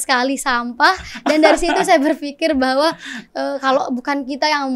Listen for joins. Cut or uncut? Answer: uncut